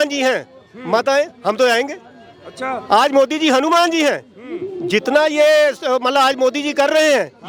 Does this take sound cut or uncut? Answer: uncut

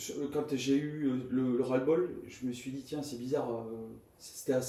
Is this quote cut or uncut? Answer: uncut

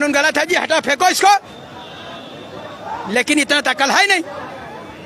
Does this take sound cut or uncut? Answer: uncut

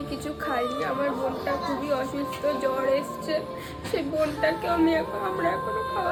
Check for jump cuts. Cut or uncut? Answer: uncut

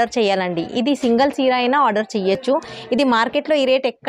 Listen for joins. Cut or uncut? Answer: uncut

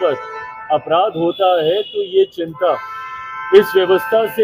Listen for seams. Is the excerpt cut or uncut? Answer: uncut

